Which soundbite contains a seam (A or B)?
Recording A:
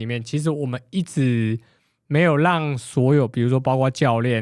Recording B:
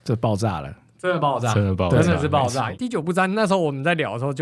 B